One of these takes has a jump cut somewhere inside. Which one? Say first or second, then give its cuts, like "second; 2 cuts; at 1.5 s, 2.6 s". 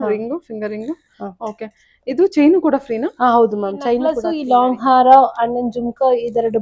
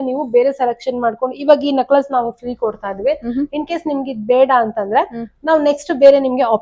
first; 1 cut; at 4.3 s